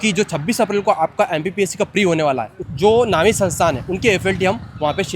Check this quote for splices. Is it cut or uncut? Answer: cut